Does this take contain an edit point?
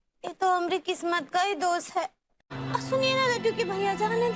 yes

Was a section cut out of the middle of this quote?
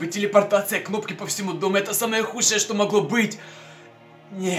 no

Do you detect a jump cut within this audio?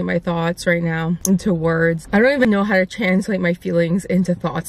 yes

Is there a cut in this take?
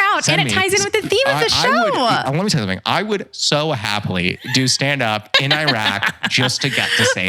no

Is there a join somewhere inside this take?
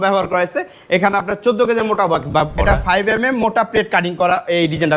yes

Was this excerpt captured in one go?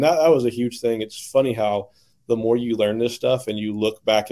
yes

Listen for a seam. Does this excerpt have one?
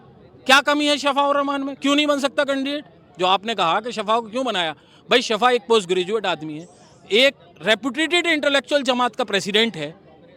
no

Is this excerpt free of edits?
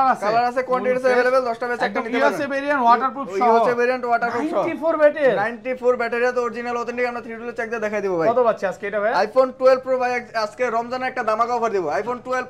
yes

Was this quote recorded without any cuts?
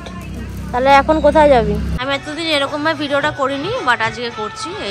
no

